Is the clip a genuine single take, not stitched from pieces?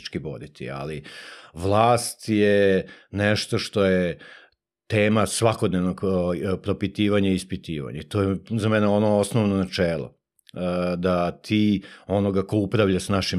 yes; 0 cuts

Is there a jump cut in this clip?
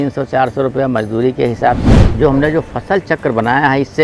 yes; 1 cut; at 1.9 s

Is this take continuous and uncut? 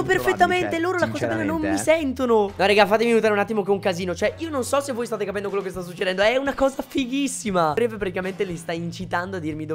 yes; 0 cuts

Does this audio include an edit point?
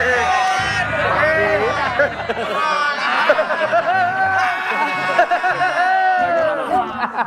no; 0 cuts

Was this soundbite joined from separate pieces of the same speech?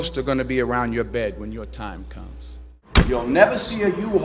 no; 0 cuts

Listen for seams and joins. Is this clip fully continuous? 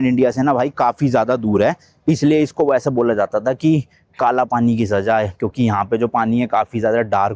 yes; 0 cuts

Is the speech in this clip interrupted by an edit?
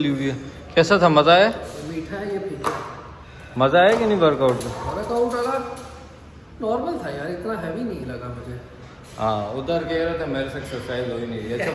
no; 0 cuts

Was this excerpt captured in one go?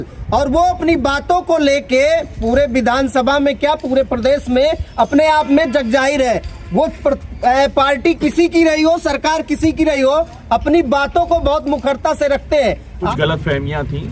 no; 1 cut; at 13.1 s

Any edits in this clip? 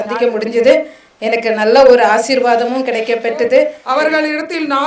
yes; 1 cut; at 3.8 s

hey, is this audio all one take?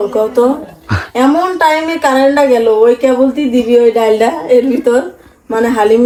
yes; 0 cuts

